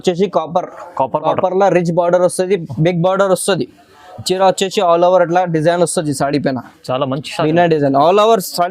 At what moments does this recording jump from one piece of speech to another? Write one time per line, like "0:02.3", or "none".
none